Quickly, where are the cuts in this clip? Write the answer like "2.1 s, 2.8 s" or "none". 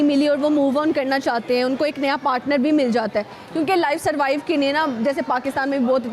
none